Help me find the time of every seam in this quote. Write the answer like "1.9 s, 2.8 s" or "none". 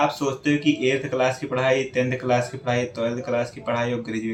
none